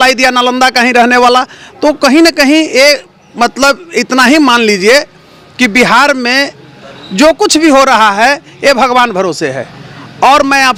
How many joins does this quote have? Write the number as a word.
zero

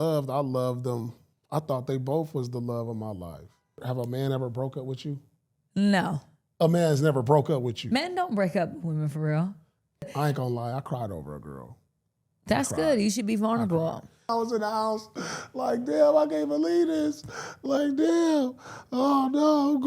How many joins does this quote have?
three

